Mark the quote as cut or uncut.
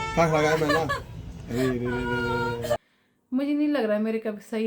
cut